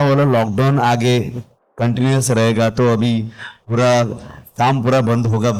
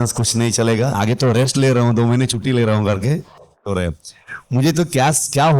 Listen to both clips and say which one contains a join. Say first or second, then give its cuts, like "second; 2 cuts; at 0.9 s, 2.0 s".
second; 2 cuts; at 1.0 s, 3.7 s